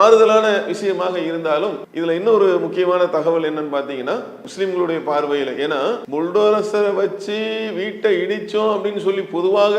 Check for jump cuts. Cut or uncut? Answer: cut